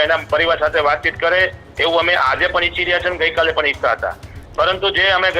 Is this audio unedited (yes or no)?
yes